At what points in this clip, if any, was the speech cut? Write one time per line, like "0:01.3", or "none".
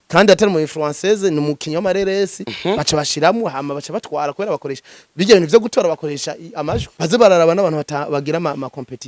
0:06.9